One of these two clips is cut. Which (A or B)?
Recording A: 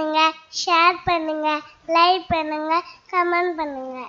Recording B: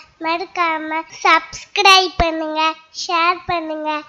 B